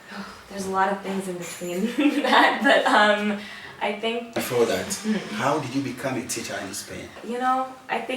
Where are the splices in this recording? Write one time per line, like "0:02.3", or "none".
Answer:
0:04.2
0:07.2